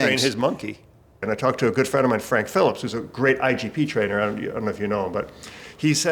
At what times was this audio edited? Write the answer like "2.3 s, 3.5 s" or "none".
1.2 s